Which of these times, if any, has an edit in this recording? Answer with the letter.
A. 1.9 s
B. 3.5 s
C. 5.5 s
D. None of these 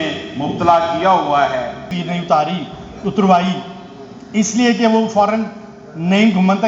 A